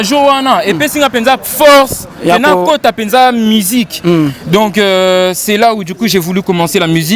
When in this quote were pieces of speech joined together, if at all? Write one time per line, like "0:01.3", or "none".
none